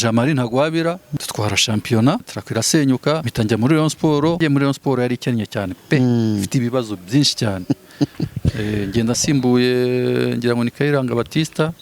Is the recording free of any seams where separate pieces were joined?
no; 4 cuts; at 1.1 s, 2.4 s, 3.3 s, 4.4 s

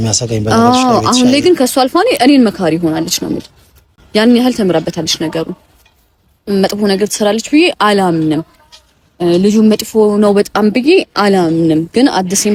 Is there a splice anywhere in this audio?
no; 0 cuts

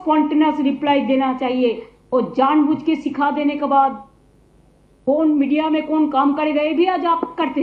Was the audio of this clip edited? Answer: no; 0 cuts

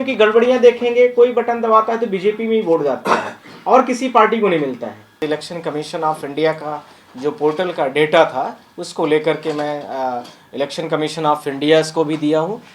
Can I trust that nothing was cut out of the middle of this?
no; 1 cut; at 5.1 s

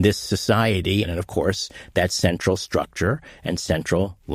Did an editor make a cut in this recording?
yes; 1 cut; at 1.0 s

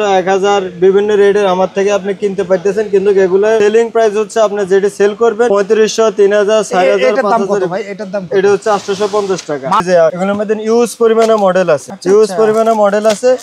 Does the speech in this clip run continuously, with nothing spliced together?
no; 4 cuts; at 3.6 s, 5.5 s, 9.8 s, 11.9 s

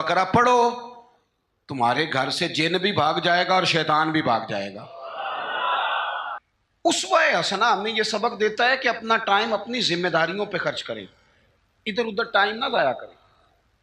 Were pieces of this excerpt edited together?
yes; 1 cut; at 6.3 s

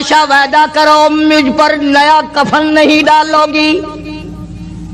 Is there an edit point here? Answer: no; 0 cuts

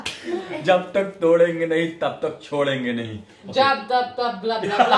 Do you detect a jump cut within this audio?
no; 0 cuts

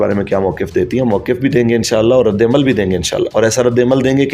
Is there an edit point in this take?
no; 0 cuts

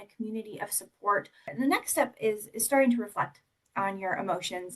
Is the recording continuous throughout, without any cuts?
no; 1 cut; at 1.5 s

